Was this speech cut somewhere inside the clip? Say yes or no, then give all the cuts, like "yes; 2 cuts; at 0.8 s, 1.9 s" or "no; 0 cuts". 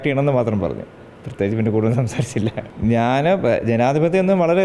yes; 1 cut; at 2.7 s